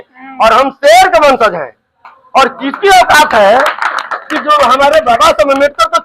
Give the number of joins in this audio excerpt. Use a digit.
0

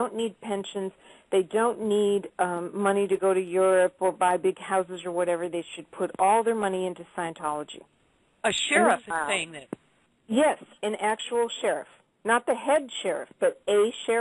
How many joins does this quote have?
0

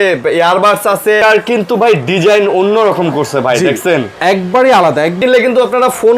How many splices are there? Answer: 2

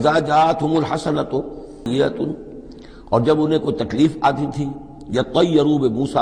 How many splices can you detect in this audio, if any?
1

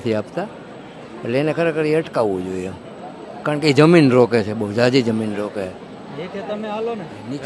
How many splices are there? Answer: 0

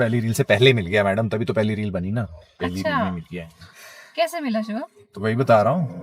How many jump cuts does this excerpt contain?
0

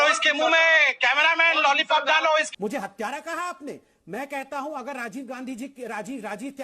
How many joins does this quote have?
2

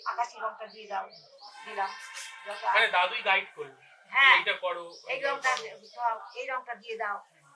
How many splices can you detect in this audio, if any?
0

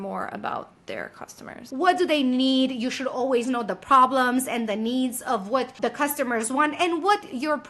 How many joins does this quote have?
1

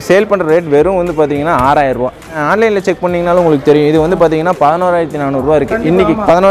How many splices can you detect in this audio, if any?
1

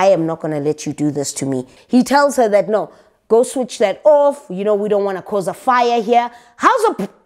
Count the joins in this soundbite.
1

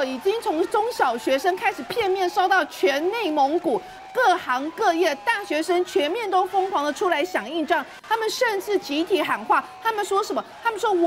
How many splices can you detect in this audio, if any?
0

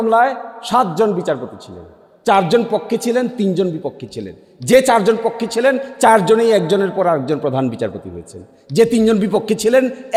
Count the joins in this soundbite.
0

